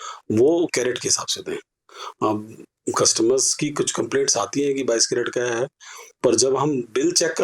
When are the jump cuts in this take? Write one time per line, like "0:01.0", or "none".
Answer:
none